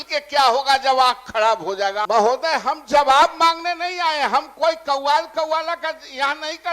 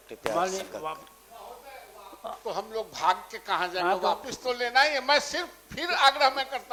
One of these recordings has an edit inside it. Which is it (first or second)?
first